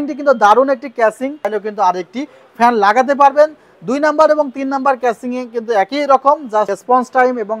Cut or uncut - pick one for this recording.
cut